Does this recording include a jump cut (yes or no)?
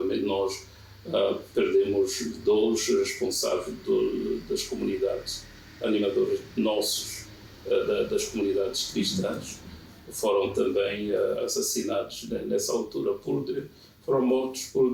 no